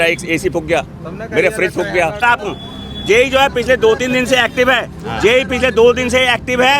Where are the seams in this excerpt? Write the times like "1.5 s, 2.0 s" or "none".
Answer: 2.2 s